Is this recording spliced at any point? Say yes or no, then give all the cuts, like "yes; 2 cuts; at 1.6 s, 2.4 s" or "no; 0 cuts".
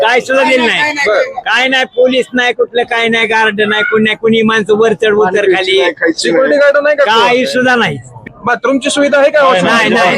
yes; 1 cut; at 8.1 s